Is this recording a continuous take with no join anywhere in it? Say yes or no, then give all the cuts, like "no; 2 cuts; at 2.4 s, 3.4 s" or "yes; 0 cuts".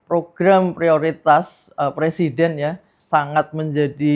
no; 1 cut; at 2.9 s